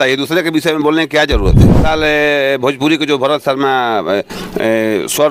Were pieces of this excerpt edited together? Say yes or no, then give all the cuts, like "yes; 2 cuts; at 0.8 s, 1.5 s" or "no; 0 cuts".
yes; 1 cut; at 1.8 s